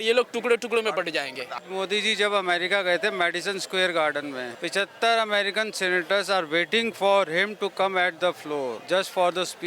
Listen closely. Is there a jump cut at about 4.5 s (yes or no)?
yes